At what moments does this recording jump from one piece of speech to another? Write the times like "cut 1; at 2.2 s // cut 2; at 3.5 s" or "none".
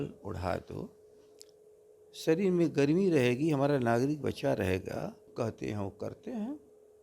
cut 1; at 5.3 s